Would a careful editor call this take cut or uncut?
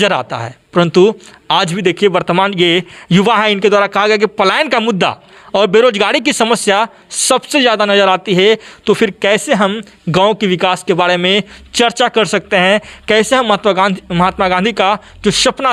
uncut